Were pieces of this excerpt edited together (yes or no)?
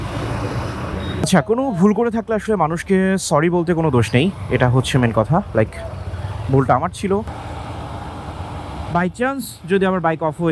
yes